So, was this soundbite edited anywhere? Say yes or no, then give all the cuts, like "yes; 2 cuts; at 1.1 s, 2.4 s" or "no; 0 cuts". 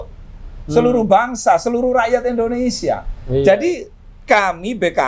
no; 0 cuts